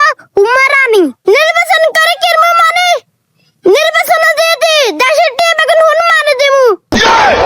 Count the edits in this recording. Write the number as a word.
one